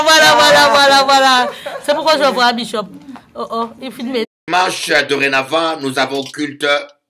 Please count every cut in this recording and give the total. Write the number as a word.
one